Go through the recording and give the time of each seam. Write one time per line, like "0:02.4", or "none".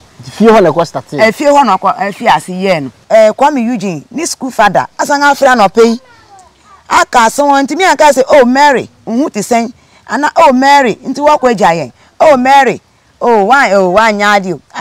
0:02.9